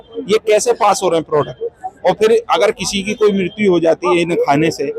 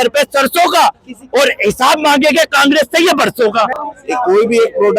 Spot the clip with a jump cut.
second; 1 cut; at 3.7 s

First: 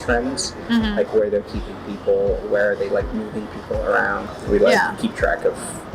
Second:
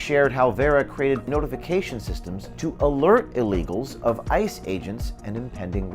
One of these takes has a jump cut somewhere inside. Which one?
second; 1 cut; at 1.2 s

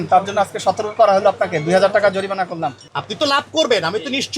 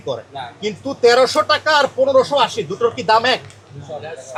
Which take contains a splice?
first; 1 cut; at 2.9 s

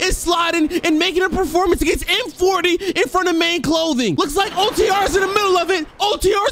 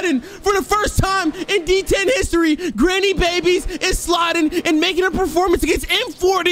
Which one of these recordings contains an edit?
first; 1 cut; at 4.1 s

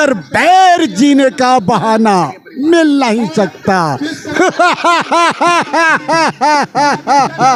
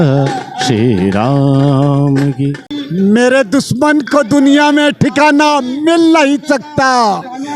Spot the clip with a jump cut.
second; 1 cut; at 2.7 s

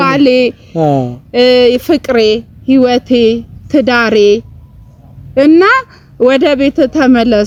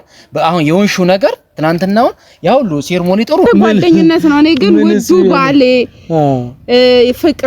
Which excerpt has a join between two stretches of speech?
second; 1 cut; at 3.5 s

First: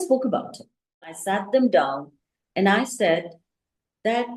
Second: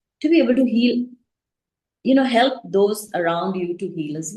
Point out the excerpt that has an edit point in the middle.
first; 1 cut; at 1.0 s

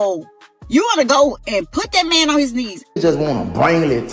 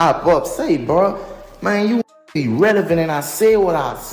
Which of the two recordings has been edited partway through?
first; 1 cut; at 2.8 s

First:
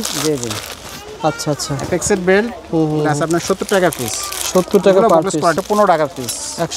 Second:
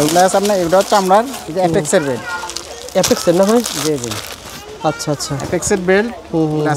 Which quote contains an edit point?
first; 1 cut; at 5.5 s

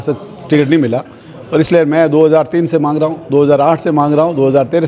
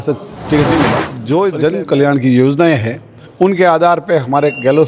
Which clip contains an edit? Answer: second; 1 cut; at 1.1 s

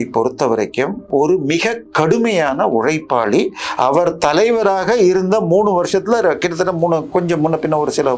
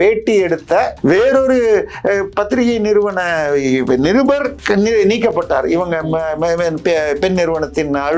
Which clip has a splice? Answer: second; 2 cuts; at 0.9 s, 4.6 s

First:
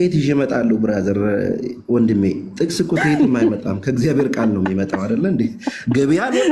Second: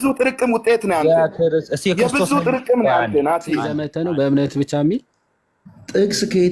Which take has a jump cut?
second; 1 cut; at 3.8 s

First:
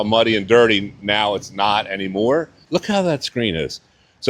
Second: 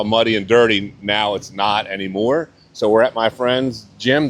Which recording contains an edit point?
first; 1 cut; at 2.6 s

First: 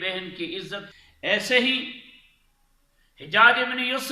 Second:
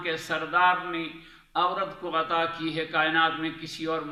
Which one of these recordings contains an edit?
first; 1 cut; at 0.9 s

